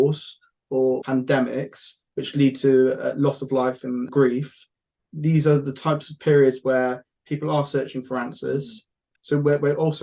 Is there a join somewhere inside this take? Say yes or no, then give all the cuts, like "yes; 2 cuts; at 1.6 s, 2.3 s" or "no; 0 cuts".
yes; 3 cuts; at 1.0 s, 4.1 s, 9.1 s